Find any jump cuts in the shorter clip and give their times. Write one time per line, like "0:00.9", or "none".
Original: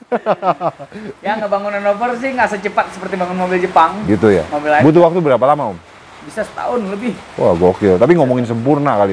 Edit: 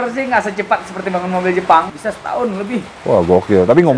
0:01.9